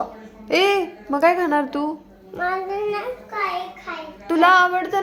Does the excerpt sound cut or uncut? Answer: uncut